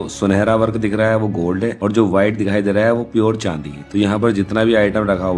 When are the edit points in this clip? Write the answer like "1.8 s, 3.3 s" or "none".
none